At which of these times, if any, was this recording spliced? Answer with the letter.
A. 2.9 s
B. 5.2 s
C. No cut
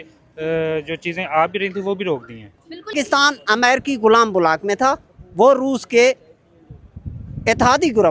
A